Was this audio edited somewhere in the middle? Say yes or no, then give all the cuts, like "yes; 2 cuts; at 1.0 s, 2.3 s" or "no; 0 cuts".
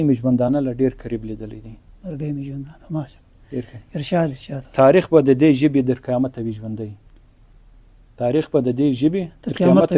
no; 0 cuts